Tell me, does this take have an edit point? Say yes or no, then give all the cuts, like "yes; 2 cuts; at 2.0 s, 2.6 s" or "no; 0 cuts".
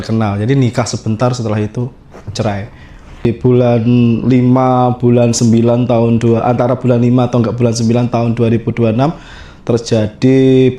yes; 1 cut; at 3.3 s